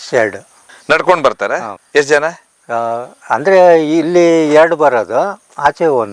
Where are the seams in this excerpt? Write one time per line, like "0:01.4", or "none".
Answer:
none